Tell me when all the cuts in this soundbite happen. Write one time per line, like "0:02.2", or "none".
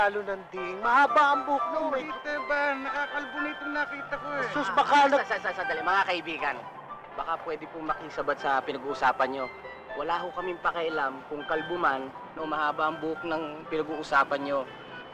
0:02.1